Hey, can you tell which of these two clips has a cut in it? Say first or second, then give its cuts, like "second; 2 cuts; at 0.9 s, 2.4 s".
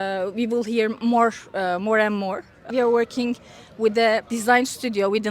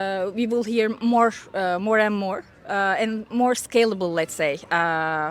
first; 2 cuts; at 2.6 s, 4.3 s